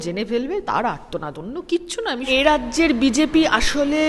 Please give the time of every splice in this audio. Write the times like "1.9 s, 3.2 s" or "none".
2.2 s